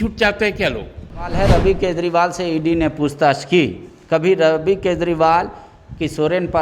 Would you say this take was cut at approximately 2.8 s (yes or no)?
no